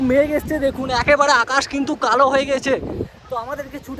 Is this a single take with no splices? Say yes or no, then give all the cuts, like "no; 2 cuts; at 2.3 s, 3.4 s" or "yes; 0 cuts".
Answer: yes; 0 cuts